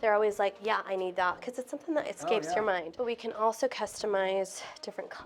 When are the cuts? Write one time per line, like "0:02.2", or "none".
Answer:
0:02.9